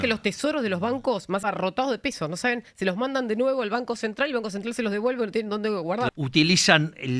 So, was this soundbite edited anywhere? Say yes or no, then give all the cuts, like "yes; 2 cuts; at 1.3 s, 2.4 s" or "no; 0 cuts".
yes; 2 cuts; at 1.4 s, 6.1 s